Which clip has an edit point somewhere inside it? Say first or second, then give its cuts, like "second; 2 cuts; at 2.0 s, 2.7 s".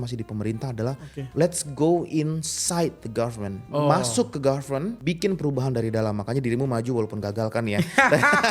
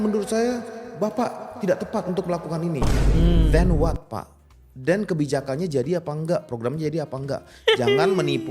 first; 2 cuts; at 3.6 s, 5.0 s